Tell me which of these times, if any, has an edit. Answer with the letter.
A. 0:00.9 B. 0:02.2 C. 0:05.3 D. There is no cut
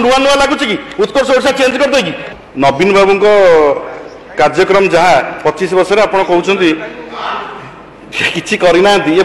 B